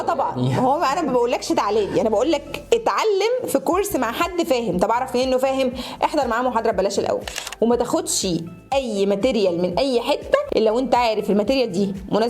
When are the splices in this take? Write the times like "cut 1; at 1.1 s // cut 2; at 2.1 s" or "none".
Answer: cut 1; at 7.4 s // cut 2; at 10.5 s